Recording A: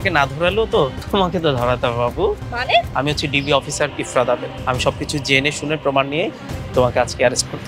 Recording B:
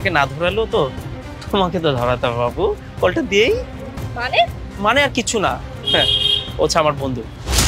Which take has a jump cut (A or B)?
A